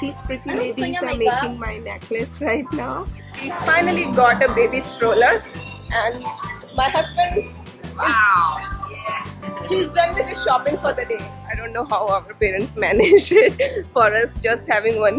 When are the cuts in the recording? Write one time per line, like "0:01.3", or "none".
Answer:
0:03.4
0:11.7